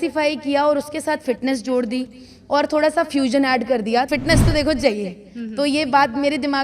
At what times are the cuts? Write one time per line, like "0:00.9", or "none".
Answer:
0:04.1